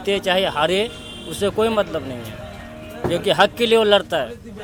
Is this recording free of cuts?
yes; 0 cuts

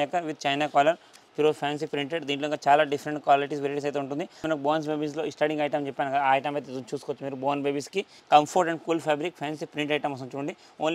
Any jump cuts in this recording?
yes; 3 cuts; at 1.2 s, 4.4 s, 8.2 s

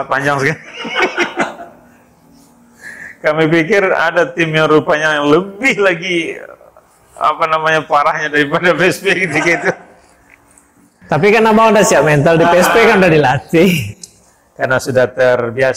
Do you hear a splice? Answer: no; 0 cuts

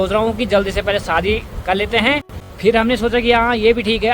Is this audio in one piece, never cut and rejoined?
no; 1 cut; at 2.4 s

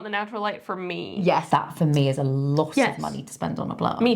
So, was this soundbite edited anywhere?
yes; 1 cut; at 1.5 s

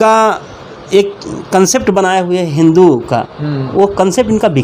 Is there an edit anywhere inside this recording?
no; 0 cuts

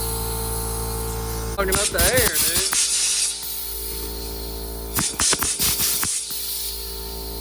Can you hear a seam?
yes; 1 cut; at 1.6 s

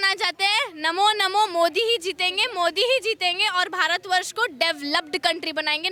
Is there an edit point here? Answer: no; 0 cuts

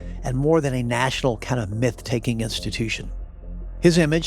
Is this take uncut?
yes; 0 cuts

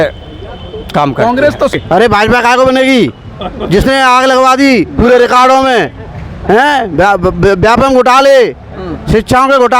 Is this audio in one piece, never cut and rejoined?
no; 1 cut; at 1.7 s

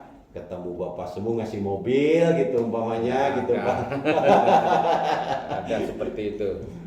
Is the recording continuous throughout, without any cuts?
yes; 0 cuts

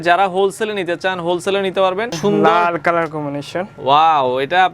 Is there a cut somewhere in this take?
yes; 1 cut; at 2.1 s

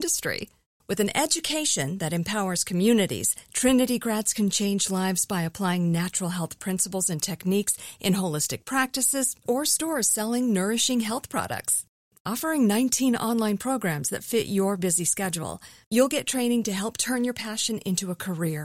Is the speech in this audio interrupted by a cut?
no; 0 cuts

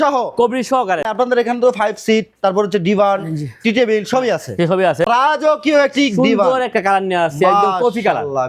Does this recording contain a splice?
yes; 2 cuts; at 1.1 s, 5.1 s

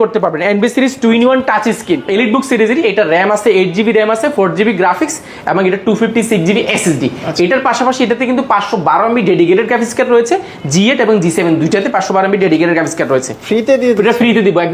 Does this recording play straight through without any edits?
no; 2 cuts; at 2.0 s, 13.4 s

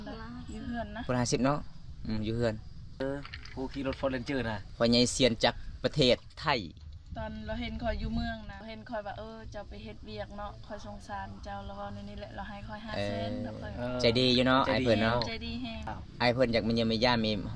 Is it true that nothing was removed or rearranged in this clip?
no; 4 cuts; at 3.0 s, 4.6 s, 8.6 s, 15.8 s

